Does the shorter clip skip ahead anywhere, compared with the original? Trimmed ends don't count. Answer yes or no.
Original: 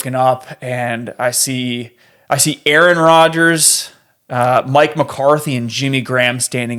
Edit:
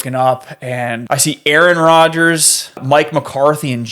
yes